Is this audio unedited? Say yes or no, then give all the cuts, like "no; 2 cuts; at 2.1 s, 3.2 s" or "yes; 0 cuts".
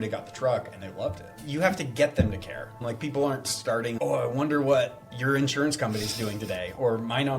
no; 3 cuts; at 1.4 s, 2.8 s, 3.9 s